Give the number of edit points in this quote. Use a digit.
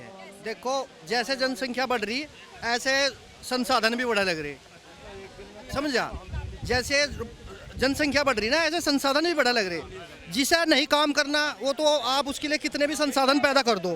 0